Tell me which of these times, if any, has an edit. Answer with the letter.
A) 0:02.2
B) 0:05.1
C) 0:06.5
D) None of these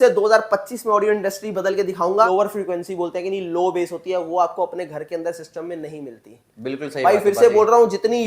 A